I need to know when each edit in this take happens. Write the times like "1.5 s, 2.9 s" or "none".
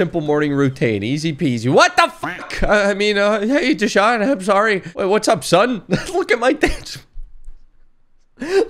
none